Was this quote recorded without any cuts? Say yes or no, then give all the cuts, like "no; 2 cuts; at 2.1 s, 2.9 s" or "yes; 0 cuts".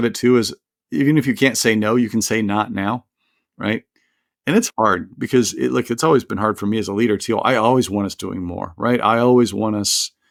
yes; 0 cuts